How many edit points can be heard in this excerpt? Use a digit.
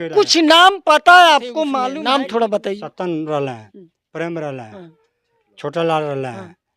1